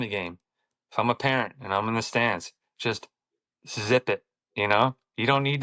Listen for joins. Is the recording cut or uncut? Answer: uncut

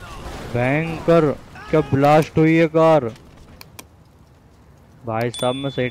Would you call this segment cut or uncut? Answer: uncut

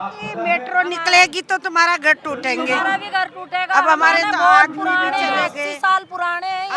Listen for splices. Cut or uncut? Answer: uncut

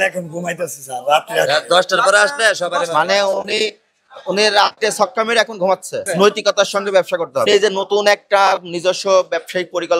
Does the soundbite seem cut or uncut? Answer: cut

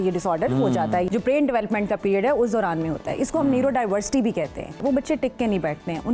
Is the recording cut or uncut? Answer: cut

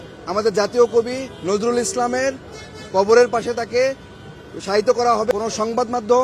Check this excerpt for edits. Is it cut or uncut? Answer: cut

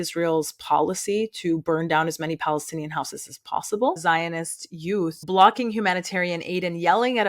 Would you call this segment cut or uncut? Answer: cut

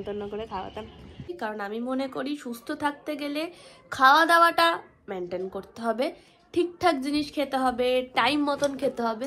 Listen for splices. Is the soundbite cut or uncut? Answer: cut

